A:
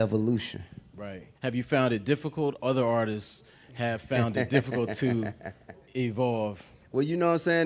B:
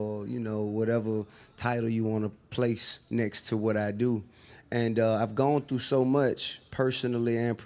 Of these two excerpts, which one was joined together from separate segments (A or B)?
B